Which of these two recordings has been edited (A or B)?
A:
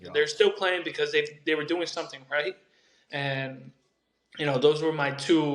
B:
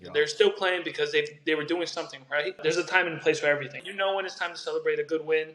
B